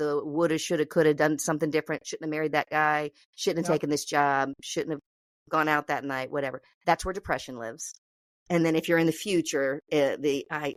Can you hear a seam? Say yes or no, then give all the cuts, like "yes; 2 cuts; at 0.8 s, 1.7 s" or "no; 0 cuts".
no; 0 cuts